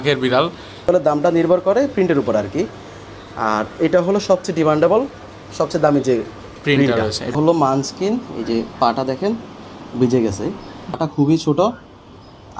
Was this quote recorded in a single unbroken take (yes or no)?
no